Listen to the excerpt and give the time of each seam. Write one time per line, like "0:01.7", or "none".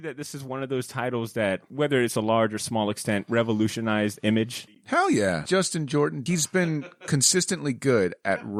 none